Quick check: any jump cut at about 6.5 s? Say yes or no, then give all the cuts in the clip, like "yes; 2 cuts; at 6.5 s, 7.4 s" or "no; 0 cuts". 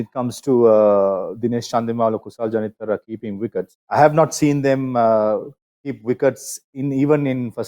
no; 1 cut; at 3.8 s